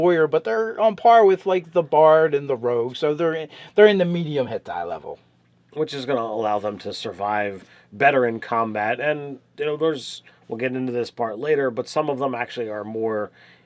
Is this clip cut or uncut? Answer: uncut